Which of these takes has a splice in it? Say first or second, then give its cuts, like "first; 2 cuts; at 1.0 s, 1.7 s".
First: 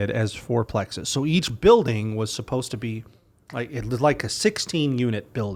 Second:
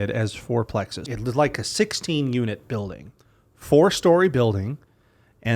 second; 1 cut; at 1.1 s